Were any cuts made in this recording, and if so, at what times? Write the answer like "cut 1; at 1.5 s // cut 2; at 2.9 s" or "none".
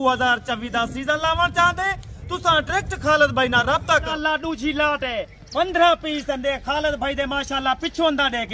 cut 1; at 4.1 s